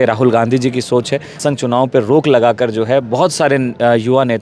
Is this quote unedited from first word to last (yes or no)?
no